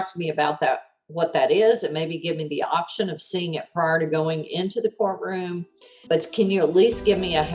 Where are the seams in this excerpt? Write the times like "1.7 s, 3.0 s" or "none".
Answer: 6.0 s

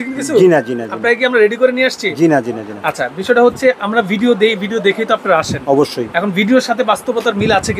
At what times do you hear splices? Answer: none

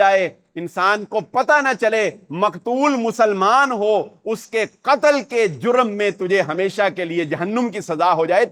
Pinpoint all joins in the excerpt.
none

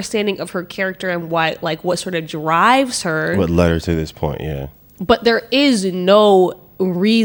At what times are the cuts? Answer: none

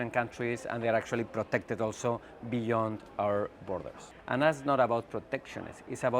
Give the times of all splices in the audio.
4.0 s

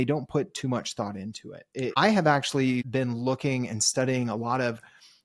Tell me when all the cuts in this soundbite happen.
1.9 s, 2.9 s

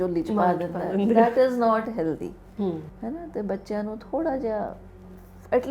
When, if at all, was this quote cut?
none

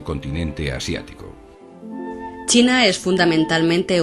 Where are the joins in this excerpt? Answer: none

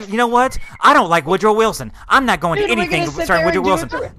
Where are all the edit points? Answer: none

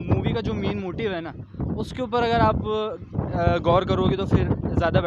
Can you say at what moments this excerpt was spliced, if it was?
none

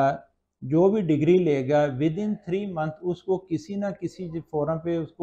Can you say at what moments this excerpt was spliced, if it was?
none

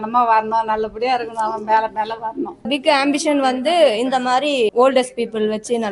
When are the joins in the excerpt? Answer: 2.7 s, 4.7 s

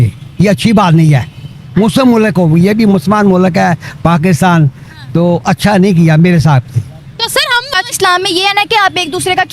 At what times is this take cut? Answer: 7.7 s

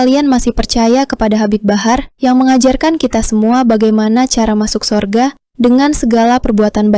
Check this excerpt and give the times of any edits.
none

